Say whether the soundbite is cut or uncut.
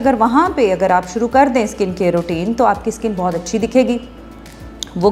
uncut